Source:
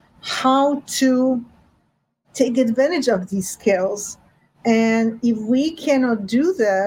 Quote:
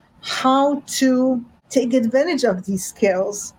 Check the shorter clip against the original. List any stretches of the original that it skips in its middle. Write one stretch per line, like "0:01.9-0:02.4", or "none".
0:01.5-0:02.2